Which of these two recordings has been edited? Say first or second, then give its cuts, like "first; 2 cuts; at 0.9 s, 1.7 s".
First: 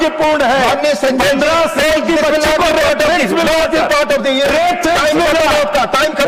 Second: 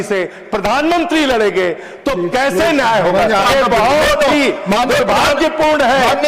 second; 1 cut; at 3.5 s